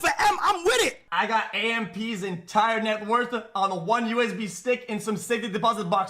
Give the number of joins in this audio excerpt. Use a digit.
1